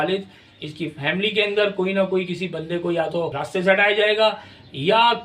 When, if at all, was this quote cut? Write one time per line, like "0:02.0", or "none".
0:03.4